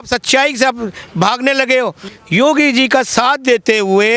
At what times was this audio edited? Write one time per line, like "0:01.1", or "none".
0:02.0